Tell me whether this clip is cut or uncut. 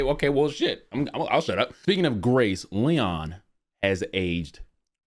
cut